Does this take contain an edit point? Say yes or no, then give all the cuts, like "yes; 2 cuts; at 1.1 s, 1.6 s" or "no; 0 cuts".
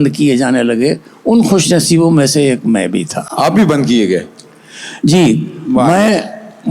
no; 0 cuts